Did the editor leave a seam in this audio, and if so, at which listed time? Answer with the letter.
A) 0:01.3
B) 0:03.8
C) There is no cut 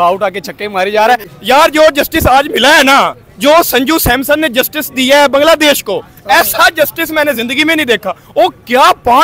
C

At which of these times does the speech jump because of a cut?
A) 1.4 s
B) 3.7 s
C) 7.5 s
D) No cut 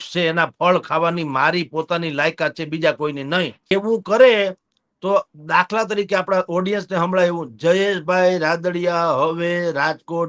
B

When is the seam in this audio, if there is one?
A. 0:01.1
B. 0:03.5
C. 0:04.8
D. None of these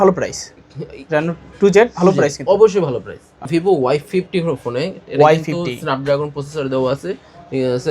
B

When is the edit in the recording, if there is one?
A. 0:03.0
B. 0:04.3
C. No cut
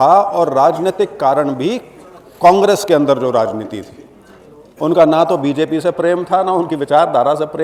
C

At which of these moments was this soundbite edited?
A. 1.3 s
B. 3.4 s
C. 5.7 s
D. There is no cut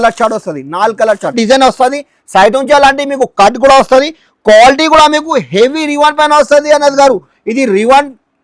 A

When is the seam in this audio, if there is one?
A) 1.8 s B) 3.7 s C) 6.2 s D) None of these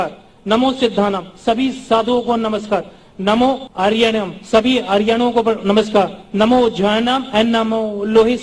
B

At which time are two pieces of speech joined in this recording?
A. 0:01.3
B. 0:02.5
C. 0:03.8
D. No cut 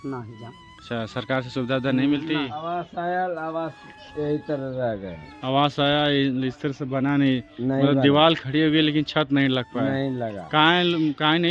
B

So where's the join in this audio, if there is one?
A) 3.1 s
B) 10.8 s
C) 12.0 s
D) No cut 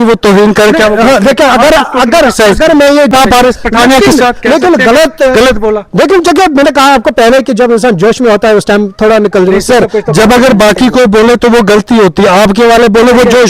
A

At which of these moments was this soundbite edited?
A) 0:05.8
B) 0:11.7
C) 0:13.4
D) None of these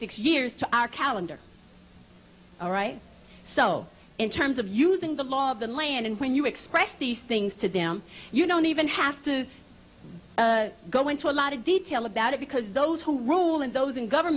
C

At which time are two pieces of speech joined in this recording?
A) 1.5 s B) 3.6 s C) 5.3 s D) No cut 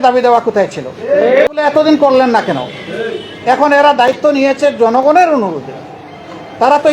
A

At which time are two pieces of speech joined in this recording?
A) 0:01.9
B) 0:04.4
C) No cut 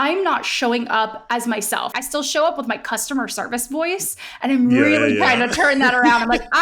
A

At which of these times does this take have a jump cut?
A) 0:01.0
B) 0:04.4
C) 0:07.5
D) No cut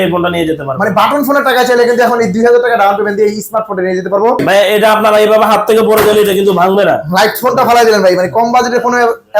B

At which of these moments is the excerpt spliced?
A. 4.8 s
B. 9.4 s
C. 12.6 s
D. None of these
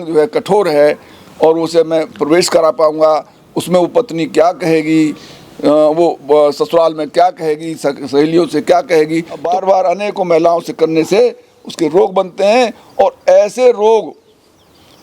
B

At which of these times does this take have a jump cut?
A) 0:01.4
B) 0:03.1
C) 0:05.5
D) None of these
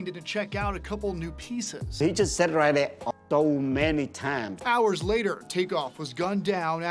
B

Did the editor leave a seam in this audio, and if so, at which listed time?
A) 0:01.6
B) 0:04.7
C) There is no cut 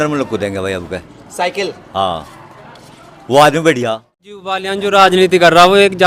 B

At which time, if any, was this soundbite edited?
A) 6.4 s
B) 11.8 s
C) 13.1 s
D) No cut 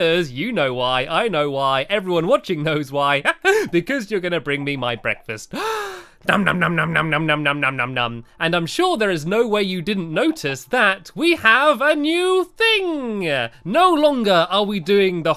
B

